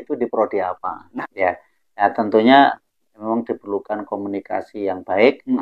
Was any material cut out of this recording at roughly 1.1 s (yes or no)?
yes